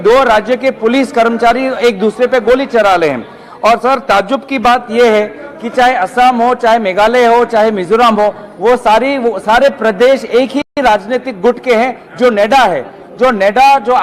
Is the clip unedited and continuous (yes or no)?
yes